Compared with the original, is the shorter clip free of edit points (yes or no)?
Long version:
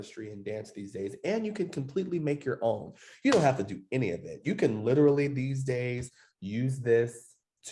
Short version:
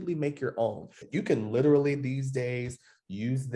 no